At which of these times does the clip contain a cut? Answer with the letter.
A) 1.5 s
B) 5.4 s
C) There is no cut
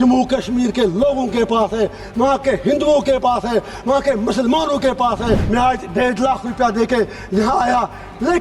B